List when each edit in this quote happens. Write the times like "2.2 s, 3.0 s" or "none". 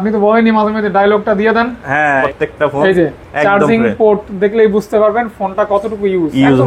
2.2 s